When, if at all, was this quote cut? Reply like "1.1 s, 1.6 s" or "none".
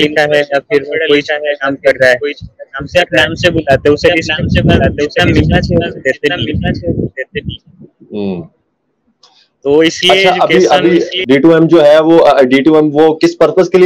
11.1 s